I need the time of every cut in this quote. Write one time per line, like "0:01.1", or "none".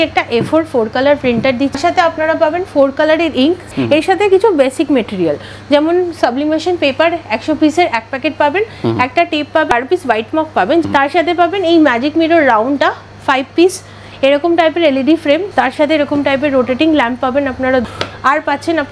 0:01.7
0:03.7
0:09.7
0:10.8
0:15.5
0:17.8